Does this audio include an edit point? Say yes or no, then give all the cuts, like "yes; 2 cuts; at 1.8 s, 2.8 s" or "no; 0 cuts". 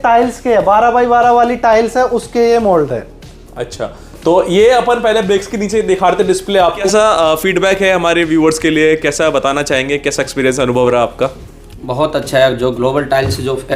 yes; 1 cut; at 6.8 s